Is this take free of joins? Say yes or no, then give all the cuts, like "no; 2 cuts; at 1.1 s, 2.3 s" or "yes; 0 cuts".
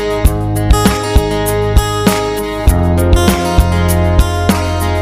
yes; 0 cuts